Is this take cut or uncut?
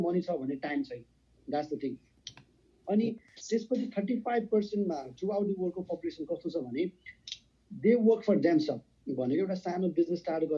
uncut